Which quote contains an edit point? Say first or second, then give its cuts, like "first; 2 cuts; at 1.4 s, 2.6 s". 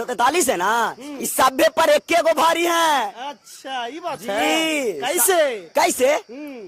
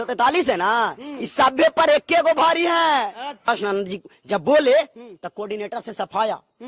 second; 1 cut; at 3.4 s